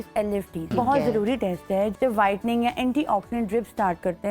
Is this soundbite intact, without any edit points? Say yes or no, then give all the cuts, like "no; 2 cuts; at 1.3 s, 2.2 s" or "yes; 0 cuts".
no; 2 cuts; at 0.7 s, 1.9 s